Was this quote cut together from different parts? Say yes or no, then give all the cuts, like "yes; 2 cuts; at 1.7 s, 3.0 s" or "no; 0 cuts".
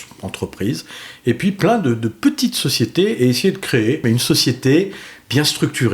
yes; 1 cut; at 4.0 s